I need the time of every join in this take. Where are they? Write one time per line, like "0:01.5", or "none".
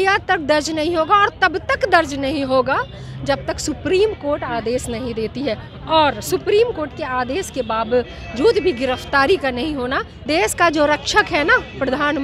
0:10.2